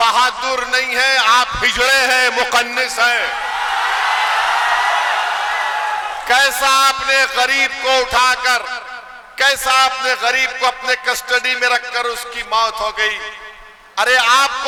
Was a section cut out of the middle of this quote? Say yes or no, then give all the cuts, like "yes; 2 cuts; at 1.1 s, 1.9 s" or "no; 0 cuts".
no; 0 cuts